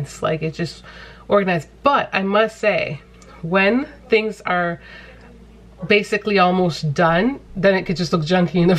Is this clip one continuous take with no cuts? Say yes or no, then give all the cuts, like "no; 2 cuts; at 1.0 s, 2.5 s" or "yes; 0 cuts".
yes; 0 cuts